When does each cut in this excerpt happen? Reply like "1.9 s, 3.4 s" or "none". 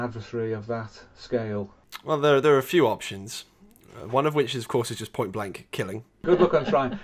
1.9 s, 6.2 s